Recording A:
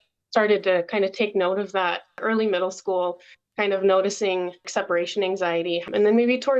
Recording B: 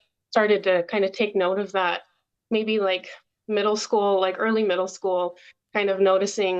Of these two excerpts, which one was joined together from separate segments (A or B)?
A